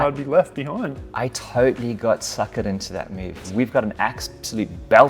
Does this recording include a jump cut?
yes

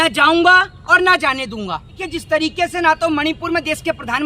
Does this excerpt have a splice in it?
yes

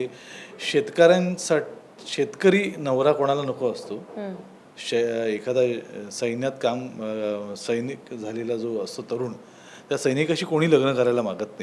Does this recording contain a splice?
no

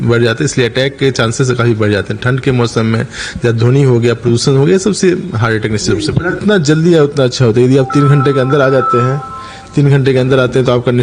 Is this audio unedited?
no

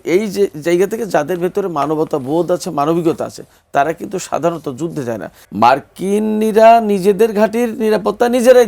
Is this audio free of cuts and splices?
no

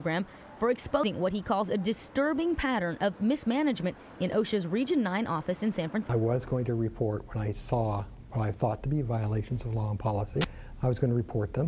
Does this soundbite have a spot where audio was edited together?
yes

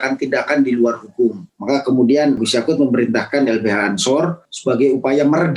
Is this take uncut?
no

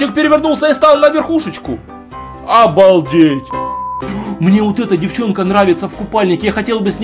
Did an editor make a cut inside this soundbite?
yes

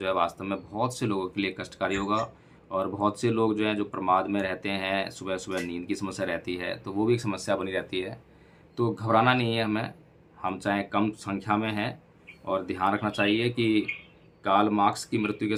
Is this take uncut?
yes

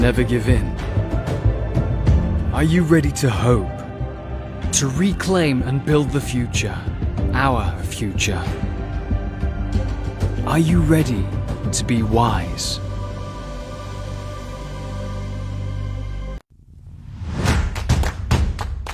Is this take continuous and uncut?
no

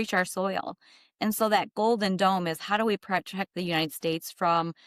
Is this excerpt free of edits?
yes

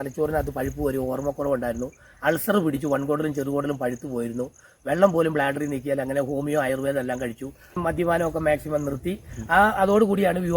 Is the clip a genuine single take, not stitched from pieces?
no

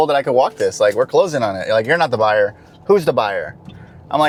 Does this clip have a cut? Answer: no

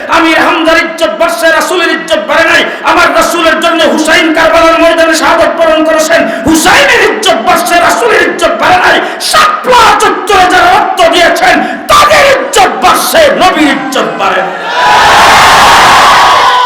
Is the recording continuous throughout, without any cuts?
yes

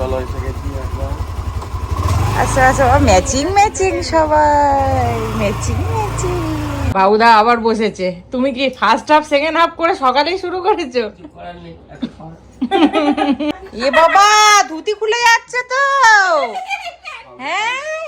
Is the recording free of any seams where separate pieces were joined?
no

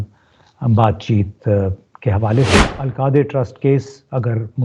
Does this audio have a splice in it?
yes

